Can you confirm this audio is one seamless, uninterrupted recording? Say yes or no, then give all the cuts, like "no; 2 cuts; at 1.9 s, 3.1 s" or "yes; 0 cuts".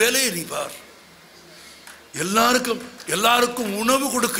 yes; 0 cuts